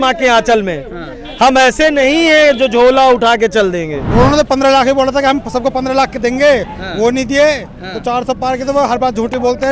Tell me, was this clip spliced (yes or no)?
yes